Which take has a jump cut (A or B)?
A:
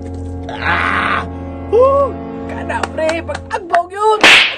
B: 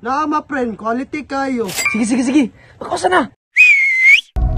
B